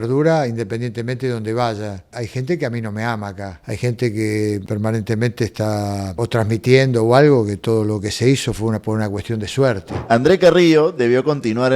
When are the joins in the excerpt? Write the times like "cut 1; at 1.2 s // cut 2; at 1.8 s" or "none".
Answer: cut 1; at 2.1 s // cut 2; at 3.5 s // cut 3; at 4.6 s // cut 4; at 6.1 s // cut 5; at 9.9 s